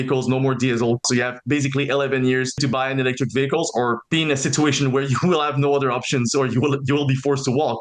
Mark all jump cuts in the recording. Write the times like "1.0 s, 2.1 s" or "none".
1.0 s, 2.5 s, 4.0 s